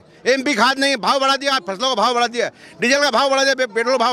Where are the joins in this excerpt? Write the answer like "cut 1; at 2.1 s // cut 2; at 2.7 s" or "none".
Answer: none